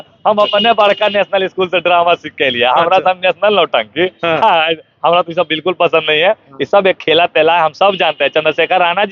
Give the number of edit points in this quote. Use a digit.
0